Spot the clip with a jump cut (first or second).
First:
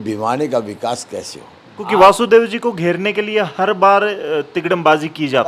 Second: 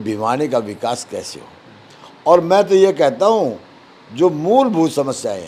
first